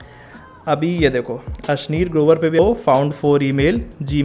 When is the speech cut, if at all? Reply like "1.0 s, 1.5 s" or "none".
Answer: 2.6 s